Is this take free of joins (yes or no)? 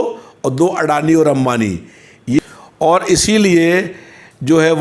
no